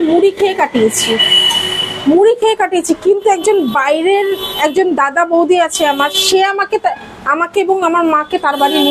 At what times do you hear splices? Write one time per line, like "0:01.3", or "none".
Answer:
none